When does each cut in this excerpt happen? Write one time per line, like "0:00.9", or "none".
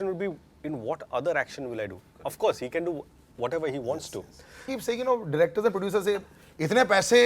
0:04.7